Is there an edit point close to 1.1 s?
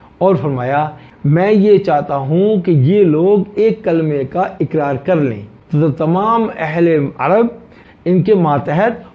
yes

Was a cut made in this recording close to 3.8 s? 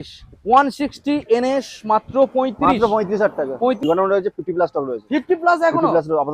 yes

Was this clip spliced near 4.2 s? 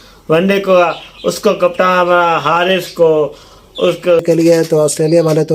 yes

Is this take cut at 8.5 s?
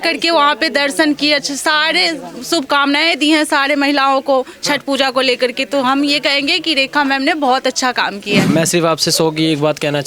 yes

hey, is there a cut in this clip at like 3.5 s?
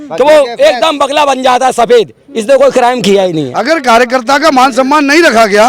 yes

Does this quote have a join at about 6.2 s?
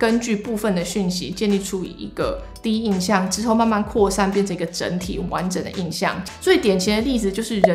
yes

